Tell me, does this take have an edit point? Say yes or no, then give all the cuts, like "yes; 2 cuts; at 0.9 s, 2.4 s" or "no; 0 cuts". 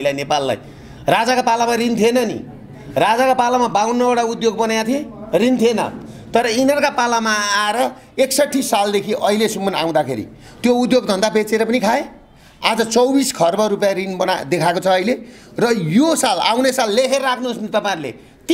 no; 0 cuts